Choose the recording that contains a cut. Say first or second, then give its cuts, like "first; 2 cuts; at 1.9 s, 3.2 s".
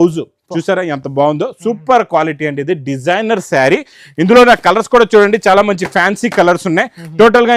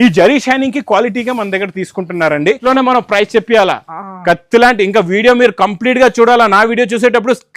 second; 1 cut; at 2.6 s